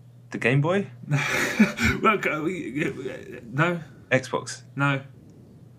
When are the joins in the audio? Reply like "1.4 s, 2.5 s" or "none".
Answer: none

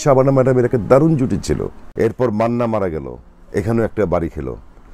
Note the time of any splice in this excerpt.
1.8 s

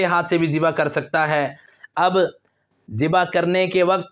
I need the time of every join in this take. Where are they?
1.7 s

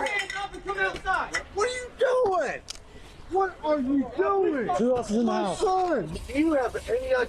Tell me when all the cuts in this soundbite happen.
1.3 s, 4.8 s, 6.2 s

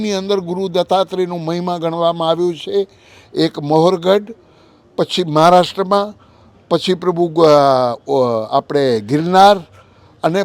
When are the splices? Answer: none

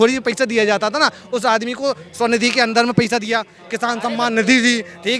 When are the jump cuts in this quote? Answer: none

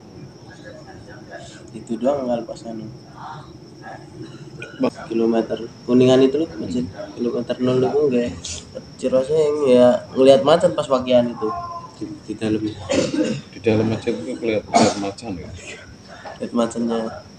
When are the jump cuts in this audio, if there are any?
4.9 s

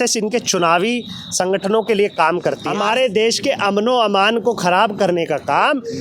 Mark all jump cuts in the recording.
2.6 s

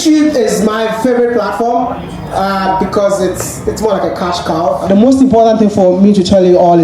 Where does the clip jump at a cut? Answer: 4.9 s

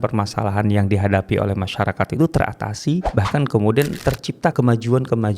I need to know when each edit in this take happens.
3.1 s, 4.5 s

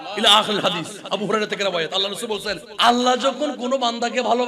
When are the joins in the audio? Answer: 2.7 s

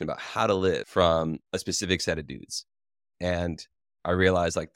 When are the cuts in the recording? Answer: none

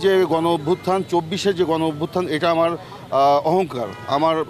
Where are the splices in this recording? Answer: none

